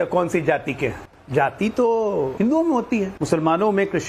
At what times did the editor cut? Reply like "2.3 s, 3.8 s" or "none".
1.0 s, 2.3 s, 3.1 s